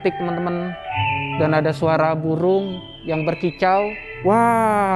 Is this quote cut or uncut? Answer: cut